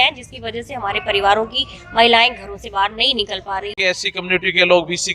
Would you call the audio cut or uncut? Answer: cut